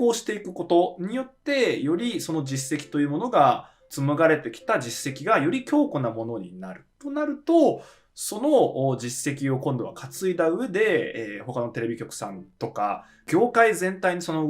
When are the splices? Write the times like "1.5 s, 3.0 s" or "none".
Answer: 3.8 s, 13.2 s